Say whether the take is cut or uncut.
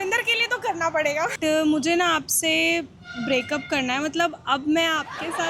cut